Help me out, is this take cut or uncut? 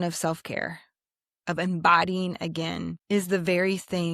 cut